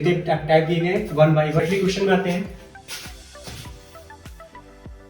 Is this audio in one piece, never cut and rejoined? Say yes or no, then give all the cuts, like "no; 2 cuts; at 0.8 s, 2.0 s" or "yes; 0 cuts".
no; 1 cut; at 1.6 s